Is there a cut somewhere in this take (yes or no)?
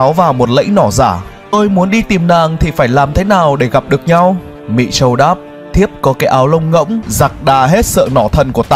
yes